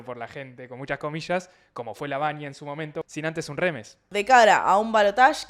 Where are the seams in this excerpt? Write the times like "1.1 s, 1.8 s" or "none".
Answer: 3.1 s, 4.0 s